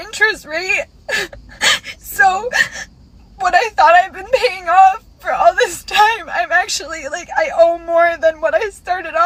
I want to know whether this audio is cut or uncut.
uncut